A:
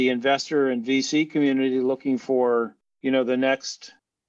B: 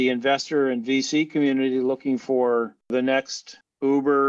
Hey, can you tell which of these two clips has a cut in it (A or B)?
B